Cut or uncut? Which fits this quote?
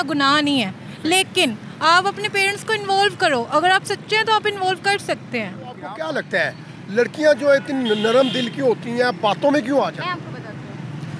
cut